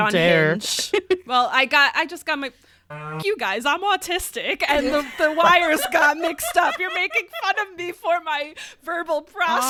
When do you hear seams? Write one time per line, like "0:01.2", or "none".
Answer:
none

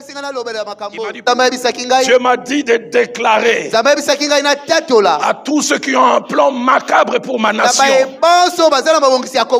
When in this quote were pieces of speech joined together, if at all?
0:01.2

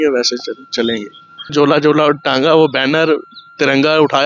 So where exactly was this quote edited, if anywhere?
0:01.5

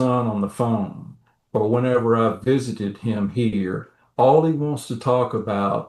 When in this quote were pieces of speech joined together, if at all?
none

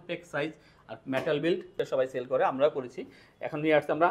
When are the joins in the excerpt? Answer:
0:01.7

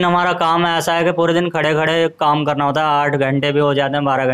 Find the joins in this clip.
none

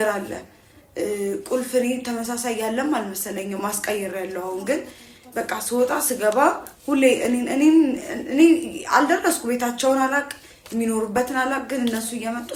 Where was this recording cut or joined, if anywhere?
none

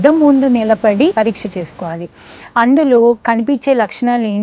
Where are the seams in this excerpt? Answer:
0:01.1

